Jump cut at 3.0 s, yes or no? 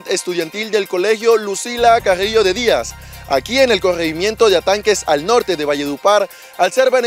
no